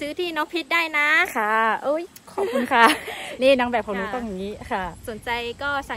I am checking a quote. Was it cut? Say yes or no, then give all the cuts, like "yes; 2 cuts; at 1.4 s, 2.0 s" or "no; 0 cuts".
no; 0 cuts